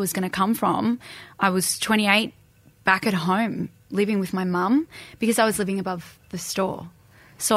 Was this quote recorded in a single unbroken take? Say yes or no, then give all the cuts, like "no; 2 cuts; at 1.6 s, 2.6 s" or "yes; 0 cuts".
yes; 0 cuts